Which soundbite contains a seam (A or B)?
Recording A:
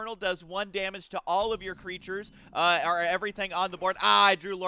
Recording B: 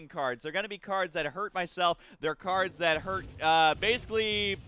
A